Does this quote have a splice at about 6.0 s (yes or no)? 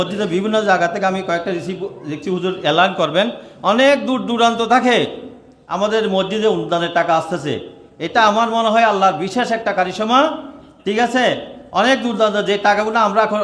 no